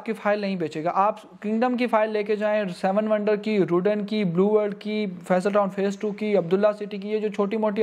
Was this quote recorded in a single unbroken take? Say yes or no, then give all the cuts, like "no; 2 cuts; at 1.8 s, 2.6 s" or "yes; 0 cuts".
yes; 0 cuts